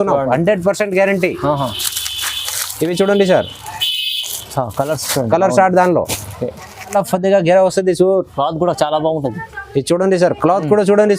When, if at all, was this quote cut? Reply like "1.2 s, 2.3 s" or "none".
6.9 s